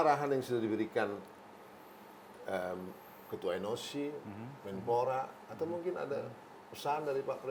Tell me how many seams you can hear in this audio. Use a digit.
0